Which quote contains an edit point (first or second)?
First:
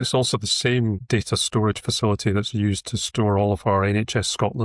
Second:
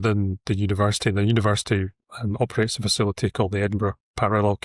first